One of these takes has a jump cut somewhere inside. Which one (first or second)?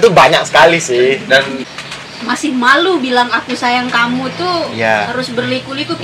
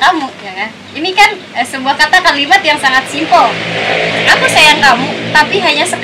first